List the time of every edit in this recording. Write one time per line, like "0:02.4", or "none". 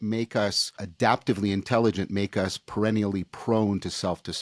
none